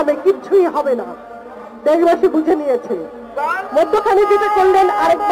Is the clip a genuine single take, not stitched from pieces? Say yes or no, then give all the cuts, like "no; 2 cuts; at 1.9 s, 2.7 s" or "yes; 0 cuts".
yes; 0 cuts